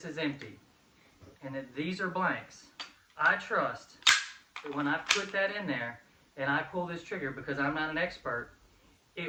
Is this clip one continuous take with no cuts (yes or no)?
yes